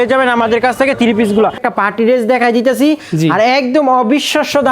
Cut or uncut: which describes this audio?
cut